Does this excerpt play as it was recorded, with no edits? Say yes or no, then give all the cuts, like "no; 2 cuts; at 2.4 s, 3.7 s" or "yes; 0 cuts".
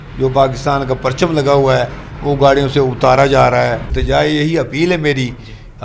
no; 1 cut; at 3.9 s